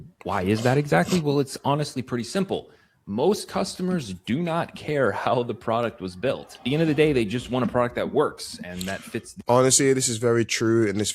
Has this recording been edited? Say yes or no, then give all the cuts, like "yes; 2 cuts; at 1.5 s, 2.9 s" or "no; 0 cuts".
no; 0 cuts